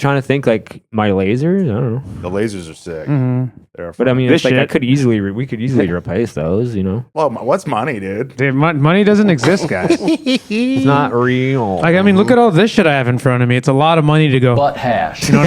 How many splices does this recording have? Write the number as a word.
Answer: one